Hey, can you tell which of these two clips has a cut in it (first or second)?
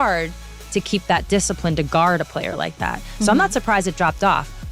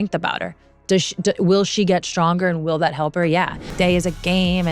second